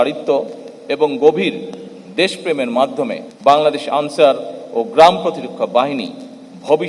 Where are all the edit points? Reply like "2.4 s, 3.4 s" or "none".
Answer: 3.2 s